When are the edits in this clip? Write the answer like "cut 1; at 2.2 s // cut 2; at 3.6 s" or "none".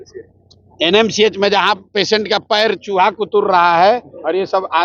none